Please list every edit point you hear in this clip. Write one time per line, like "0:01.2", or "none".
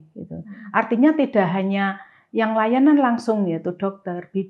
none